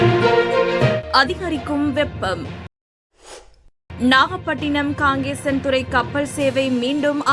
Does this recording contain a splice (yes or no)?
yes